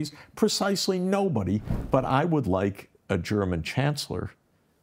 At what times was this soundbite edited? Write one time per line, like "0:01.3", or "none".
0:01.7